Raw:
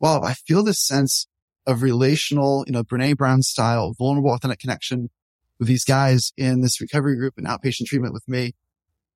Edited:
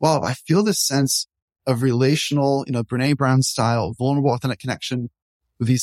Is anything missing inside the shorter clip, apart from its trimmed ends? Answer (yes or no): no